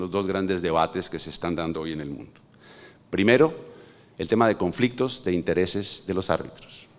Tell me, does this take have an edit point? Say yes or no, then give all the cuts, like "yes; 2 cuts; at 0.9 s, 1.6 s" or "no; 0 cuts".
no; 0 cuts